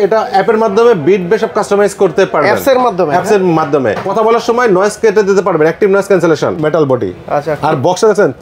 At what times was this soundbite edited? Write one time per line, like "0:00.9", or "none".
0:04.0
0:06.6